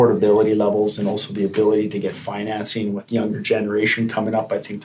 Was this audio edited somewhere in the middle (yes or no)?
no